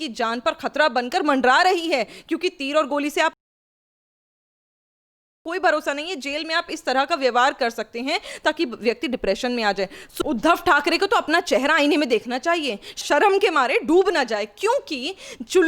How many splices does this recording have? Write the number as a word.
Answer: one